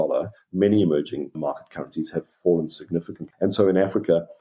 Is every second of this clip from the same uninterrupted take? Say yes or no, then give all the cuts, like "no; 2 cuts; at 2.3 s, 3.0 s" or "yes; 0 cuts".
no; 2 cuts; at 1.3 s, 3.2 s